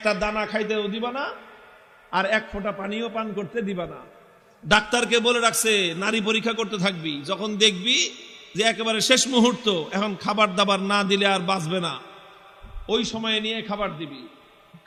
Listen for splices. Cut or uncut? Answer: uncut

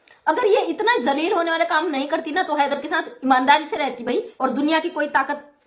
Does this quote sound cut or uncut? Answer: cut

